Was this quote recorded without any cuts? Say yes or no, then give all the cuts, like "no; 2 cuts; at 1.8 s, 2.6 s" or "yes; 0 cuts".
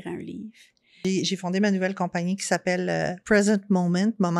no; 1 cut; at 1.0 s